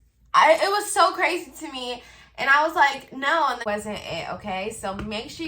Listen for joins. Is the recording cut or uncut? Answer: cut